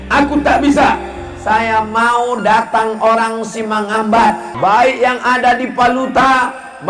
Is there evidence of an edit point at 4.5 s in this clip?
yes; 1 cut; at 4.5 s

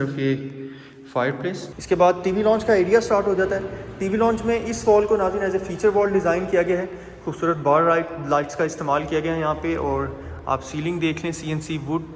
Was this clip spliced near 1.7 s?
yes; 1 cut; at 1.7 s

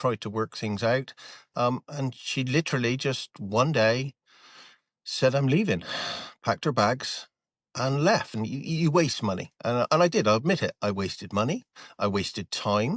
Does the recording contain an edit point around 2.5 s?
no; 1 cut; at 8.3 s

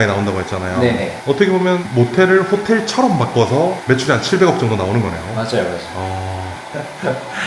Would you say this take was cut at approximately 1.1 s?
no; 0 cuts

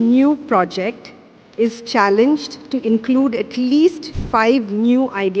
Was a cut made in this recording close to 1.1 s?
no; 1 cut; at 4.1 s

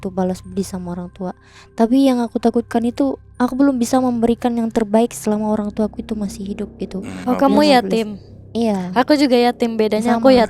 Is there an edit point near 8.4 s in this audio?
no; 1 cut; at 7.1 s

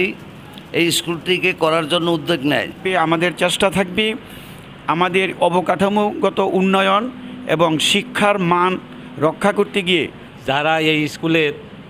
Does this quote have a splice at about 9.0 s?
no; 2 cuts; at 2.8 s, 10.3 s

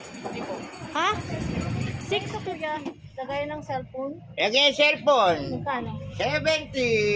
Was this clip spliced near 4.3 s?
no; 1 cut; at 2.4 s

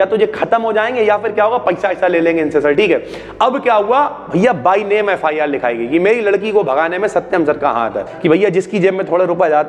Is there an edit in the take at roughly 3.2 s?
no; 1 cut; at 8.1 s

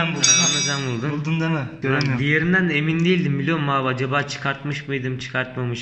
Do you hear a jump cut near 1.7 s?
yes; 1 cut; at 1.7 s

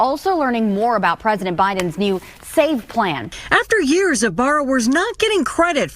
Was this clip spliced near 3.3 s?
yes; 1 cut; at 3.3 s

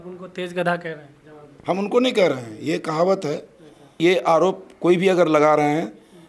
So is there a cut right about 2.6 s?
no; 1 cut; at 3.9 s

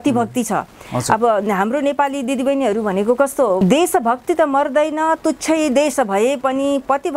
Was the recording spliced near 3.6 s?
yes; 1 cut; at 3.6 s

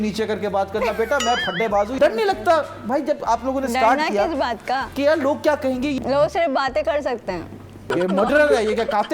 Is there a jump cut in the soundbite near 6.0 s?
yes; 4 cuts; at 2.0 s, 4.9 s, 6.0 s, 7.9 s

